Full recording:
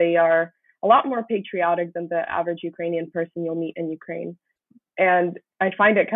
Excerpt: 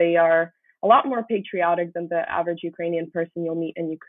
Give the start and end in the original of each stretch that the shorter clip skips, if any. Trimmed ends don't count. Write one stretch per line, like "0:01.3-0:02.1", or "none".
none